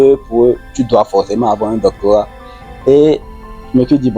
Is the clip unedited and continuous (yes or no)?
yes